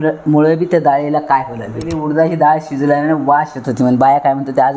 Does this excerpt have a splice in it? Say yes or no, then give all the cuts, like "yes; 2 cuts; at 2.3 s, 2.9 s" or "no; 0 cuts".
yes; 1 cut; at 2.0 s